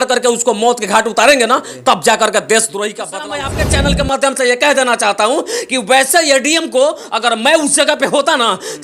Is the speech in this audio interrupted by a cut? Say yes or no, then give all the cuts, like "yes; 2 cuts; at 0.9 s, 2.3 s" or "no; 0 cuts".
yes; 1 cut; at 3.4 s